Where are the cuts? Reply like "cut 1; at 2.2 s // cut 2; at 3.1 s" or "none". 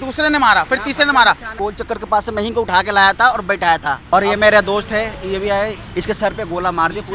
cut 1; at 1.5 s // cut 2; at 4.0 s